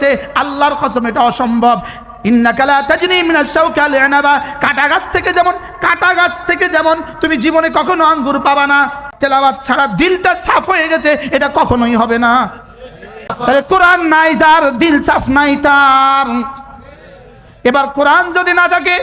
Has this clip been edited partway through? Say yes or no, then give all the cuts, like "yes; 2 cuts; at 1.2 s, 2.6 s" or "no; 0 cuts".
yes; 2 cuts; at 9.1 s, 13.3 s